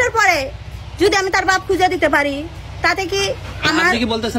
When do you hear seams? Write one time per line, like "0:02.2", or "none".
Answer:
none